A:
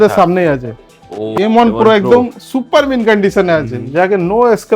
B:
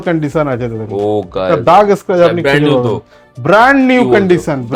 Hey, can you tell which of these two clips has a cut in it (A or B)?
A